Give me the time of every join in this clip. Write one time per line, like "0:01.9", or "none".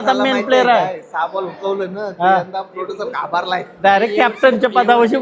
none